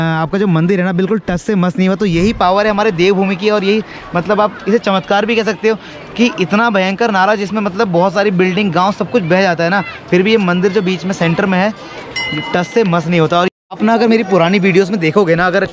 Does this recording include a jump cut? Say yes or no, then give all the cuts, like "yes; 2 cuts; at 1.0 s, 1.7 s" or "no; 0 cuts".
no; 0 cuts